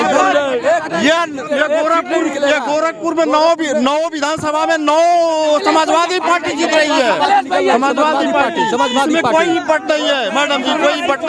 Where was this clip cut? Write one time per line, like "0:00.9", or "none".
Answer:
none